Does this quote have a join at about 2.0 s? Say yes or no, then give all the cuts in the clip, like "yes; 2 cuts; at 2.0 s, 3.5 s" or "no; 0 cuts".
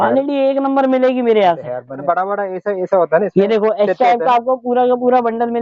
yes; 1 cut; at 2.0 s